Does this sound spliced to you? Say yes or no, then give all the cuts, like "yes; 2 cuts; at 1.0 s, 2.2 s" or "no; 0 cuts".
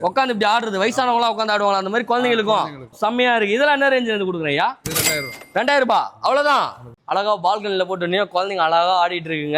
yes; 1 cut; at 6.9 s